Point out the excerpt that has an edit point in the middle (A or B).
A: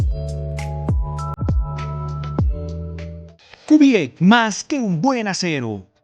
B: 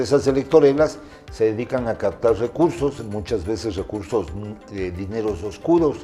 A